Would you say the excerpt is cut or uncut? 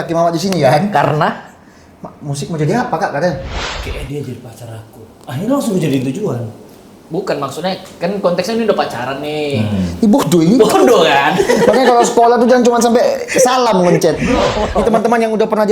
cut